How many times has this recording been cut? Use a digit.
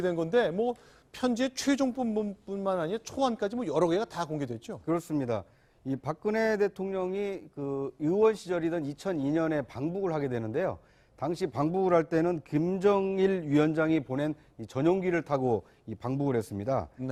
0